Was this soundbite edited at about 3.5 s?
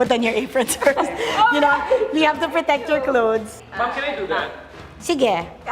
yes; 1 cut; at 3.5 s

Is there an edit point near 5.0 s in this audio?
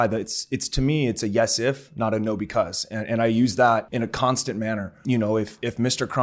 yes; 2 cuts; at 3.9 s, 5.0 s

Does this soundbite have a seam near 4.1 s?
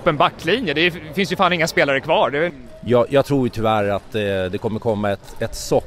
no; 1 cut; at 2.5 s

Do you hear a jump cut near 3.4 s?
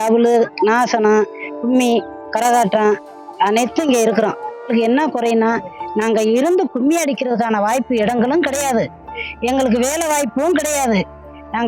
no; 1 cut; at 4.7 s

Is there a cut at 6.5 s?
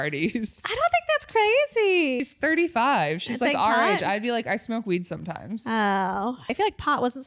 yes; 2 cuts; at 2.2 s, 6.5 s

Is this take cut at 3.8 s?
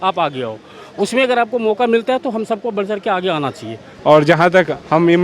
yes; 1 cut; at 3.8 s

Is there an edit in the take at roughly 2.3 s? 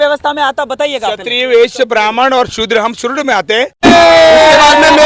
no; 1 cut; at 3.9 s

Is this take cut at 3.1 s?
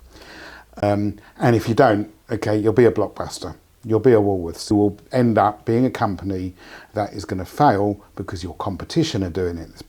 no; 2 cuts; at 0.8 s, 4.7 s

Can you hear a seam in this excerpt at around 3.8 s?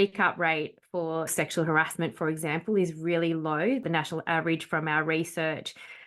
yes; 2 cuts; at 1.3 s, 3.8 s

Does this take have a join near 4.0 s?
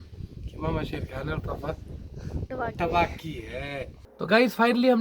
yes; 1 cut; at 4.0 s

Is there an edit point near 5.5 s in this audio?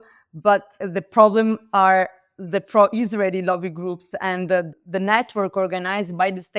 no; 1 cut; at 0.9 s

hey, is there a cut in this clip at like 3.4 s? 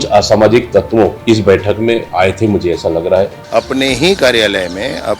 yes; 3 cuts; at 1.2 s, 2.1 s, 3.4 s

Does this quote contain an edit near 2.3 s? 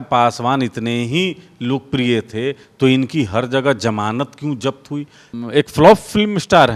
no; 1 cut; at 5.3 s

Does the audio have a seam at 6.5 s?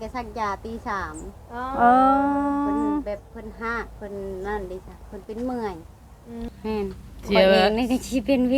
yes; 1 cut; at 6.5 s

